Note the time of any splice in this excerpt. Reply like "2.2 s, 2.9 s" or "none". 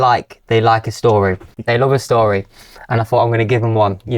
none